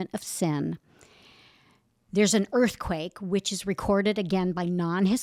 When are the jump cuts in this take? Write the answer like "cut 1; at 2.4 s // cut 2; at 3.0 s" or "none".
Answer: none